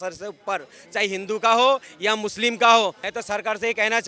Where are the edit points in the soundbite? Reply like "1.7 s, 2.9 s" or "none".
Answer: 3.1 s